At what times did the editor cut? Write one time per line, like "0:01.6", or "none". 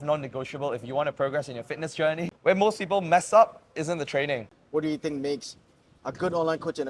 0:02.3
0:04.5